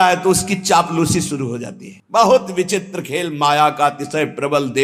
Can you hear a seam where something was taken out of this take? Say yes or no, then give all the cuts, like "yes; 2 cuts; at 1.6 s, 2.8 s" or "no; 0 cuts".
no; 0 cuts